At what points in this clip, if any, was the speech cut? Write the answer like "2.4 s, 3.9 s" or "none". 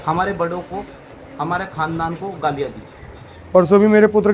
3.3 s